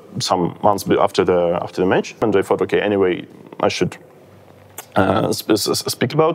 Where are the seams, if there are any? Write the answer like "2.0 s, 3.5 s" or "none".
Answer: 2.2 s